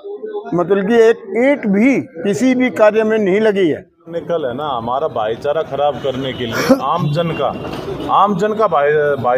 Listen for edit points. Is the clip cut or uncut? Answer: cut